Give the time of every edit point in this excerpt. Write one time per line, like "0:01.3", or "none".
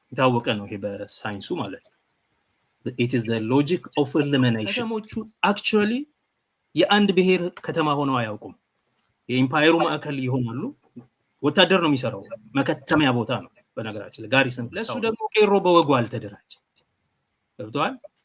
0:05.2
0:14.9